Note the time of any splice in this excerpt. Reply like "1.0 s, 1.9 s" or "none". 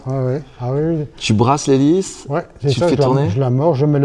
none